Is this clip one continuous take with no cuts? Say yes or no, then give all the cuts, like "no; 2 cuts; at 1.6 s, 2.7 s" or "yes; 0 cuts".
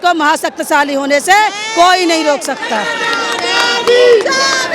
yes; 0 cuts